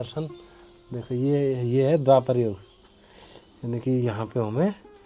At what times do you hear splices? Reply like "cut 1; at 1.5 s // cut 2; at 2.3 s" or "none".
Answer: none